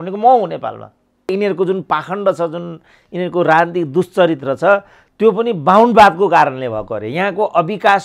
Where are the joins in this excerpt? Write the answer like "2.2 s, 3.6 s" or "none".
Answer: 1.3 s